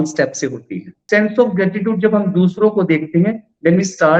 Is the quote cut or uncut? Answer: cut